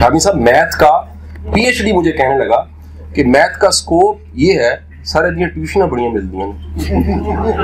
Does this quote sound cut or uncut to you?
uncut